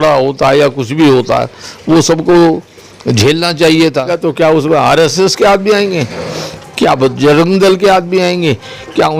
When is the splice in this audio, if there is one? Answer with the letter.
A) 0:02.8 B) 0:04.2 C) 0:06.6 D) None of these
B